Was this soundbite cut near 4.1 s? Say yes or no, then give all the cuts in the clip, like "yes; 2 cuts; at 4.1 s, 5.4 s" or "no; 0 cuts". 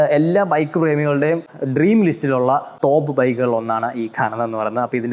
no; 2 cuts; at 1.5 s, 2.7 s